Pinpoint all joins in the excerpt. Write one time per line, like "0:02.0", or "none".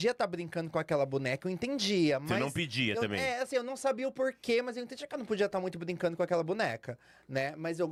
none